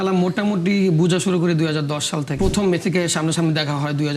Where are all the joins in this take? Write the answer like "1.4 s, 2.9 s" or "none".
2.3 s